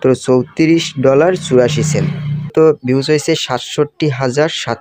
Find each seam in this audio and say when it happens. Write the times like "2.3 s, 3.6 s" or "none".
2.5 s